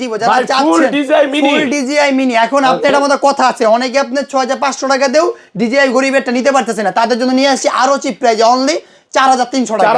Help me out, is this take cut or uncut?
uncut